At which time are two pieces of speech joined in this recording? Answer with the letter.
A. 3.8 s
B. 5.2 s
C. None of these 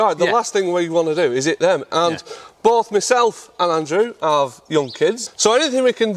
B